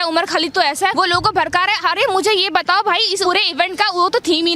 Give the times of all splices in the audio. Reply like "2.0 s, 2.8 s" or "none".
0.9 s, 3.2 s